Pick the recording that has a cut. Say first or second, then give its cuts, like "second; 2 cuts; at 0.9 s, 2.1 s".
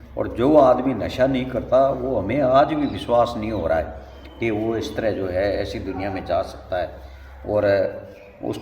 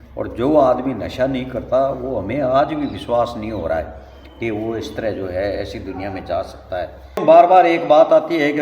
second; 1 cut; at 7.2 s